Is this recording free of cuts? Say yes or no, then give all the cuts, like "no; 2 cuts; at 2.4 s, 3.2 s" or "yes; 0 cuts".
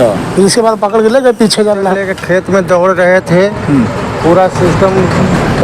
no; 1 cut; at 2.1 s